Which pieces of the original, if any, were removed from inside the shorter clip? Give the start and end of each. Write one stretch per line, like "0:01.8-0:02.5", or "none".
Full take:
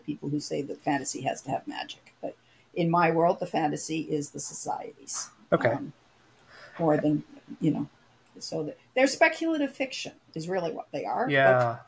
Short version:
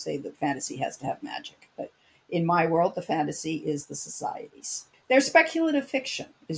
0:05.4-0:08.8